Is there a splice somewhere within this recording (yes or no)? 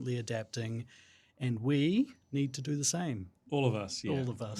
yes